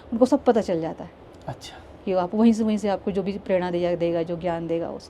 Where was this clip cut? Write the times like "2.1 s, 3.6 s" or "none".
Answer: none